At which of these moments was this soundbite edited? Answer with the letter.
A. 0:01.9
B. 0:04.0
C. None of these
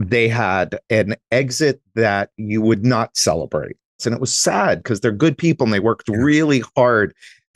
B